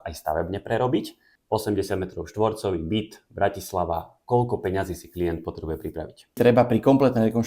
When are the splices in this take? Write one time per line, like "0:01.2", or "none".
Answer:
0:01.3
0:06.3